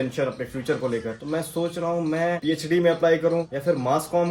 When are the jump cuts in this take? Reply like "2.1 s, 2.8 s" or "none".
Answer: none